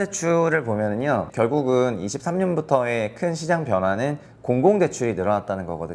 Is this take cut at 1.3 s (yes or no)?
yes